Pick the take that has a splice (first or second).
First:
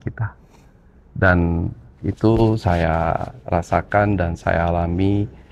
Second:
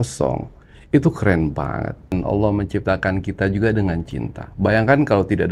second